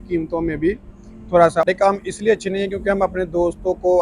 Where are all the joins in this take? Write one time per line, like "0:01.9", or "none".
0:01.7

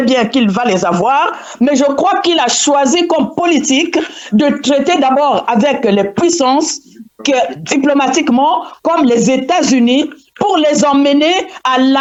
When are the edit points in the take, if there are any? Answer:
none

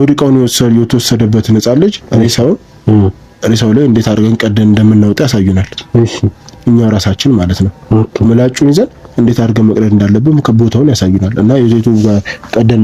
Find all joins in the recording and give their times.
none

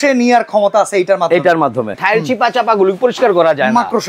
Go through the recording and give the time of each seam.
0:02.0

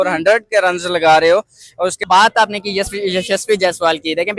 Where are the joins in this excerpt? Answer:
0:02.0

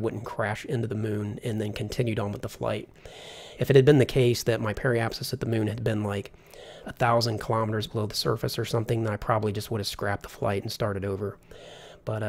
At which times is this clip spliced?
0:09.6

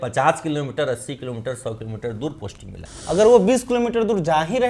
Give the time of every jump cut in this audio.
0:02.7

